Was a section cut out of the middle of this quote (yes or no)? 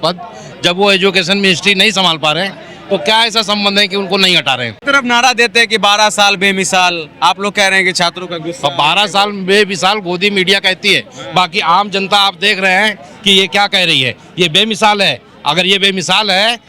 no